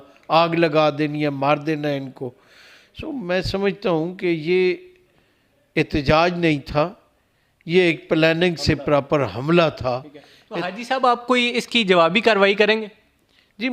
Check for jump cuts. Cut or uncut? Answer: uncut